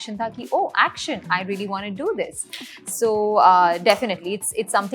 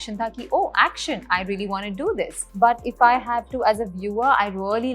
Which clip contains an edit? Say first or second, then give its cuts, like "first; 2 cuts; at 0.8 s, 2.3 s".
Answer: second; 1 cut; at 2.4 s